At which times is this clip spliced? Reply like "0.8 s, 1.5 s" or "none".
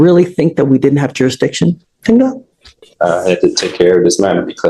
none